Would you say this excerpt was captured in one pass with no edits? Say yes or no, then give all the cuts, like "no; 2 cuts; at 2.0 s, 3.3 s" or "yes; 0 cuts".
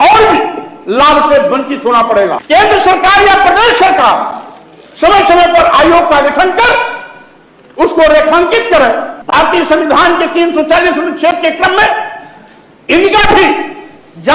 no; 2 cuts; at 2.4 s, 9.1 s